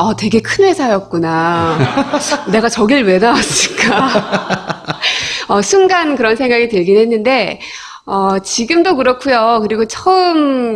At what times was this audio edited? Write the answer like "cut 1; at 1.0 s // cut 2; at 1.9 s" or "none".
cut 1; at 8.5 s